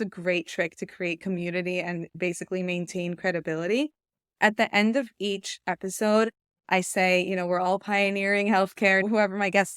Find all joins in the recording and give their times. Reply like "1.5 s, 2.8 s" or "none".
2.1 s, 9.0 s